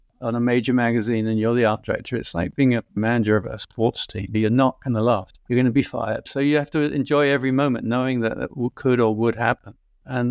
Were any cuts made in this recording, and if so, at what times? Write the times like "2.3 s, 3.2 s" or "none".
none

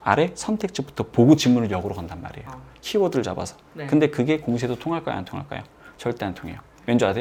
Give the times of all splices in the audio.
none

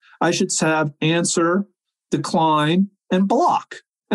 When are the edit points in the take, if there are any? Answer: 1.8 s

